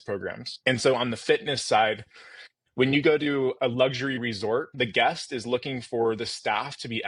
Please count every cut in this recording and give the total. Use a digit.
2